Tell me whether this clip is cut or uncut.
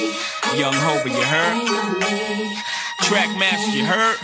uncut